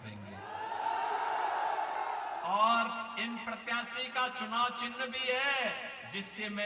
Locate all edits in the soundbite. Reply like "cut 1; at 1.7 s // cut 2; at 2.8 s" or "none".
cut 1; at 2.0 s